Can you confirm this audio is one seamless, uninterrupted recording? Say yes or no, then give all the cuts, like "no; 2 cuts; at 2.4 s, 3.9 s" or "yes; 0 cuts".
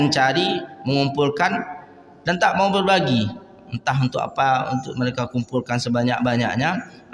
yes; 0 cuts